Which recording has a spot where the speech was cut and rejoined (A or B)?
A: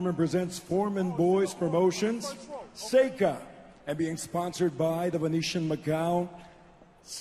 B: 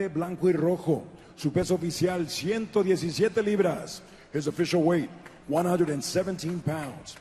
B